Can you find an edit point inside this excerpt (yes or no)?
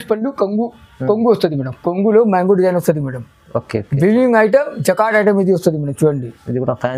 no